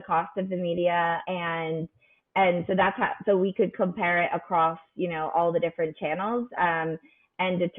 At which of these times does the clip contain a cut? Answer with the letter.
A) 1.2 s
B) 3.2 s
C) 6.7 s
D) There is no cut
A